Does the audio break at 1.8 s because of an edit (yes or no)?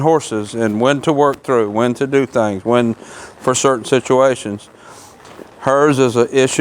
no